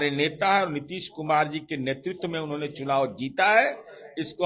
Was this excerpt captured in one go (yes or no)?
yes